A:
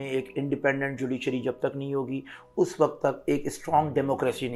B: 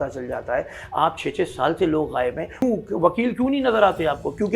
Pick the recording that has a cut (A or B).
B